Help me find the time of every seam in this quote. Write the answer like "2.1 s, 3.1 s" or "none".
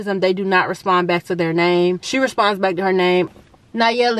2.0 s, 3.3 s